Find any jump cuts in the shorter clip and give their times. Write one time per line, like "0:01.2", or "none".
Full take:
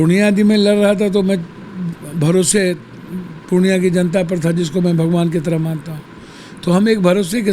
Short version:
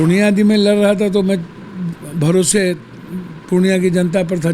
none